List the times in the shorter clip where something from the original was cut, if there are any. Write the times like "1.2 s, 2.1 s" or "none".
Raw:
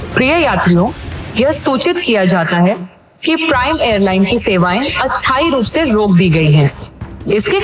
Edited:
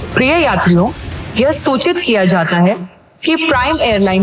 none